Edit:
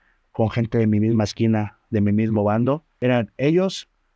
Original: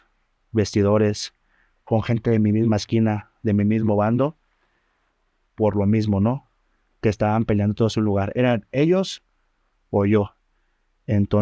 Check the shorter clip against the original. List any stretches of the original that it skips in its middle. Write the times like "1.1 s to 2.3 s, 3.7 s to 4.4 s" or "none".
4.5 s to 8.3 s